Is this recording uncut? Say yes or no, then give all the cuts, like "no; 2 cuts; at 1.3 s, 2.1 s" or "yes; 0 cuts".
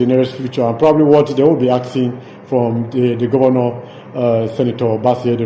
yes; 0 cuts